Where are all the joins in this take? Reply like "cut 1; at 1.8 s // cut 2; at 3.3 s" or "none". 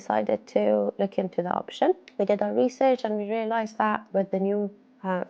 cut 1; at 2.1 s // cut 2; at 4.0 s